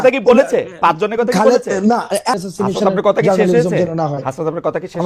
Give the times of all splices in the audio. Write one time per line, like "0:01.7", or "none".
0:02.3